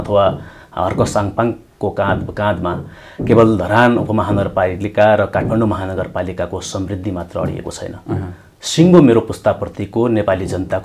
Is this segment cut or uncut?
uncut